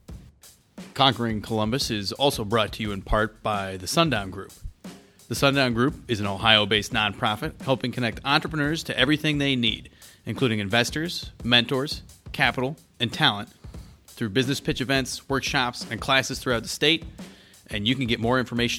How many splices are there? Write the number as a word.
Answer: one